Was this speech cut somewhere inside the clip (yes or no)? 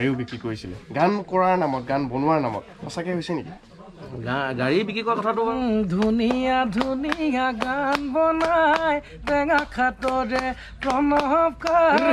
yes